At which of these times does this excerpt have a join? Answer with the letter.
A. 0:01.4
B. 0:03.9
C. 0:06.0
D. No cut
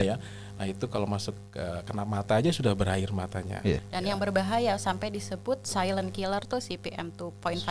B